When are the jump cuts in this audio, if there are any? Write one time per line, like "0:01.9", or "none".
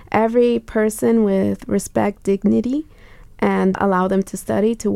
0:03.8